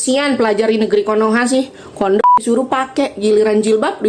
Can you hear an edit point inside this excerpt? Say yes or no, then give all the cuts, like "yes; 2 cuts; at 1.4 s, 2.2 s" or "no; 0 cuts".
no; 0 cuts